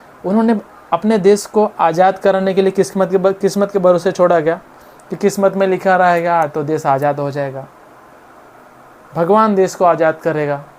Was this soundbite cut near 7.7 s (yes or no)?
no